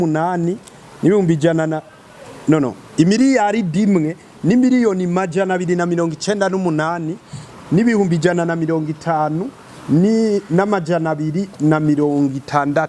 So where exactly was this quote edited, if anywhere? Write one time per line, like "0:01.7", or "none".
none